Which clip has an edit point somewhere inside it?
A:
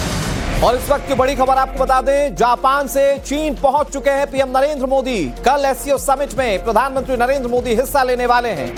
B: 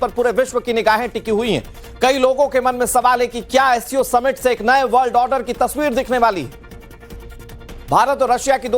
B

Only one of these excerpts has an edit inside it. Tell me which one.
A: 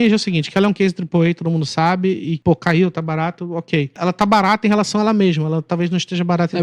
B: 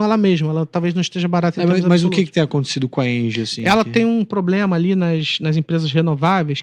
A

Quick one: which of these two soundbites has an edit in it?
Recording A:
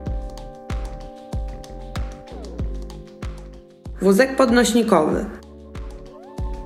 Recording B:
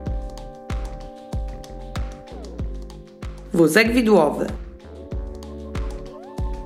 A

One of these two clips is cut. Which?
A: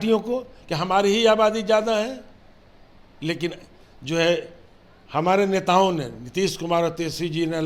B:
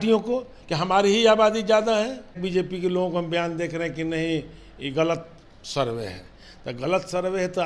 B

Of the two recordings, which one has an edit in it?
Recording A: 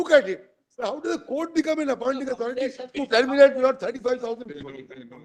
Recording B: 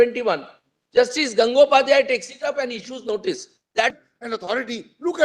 B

